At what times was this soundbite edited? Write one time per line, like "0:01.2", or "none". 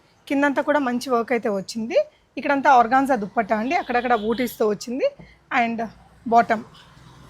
none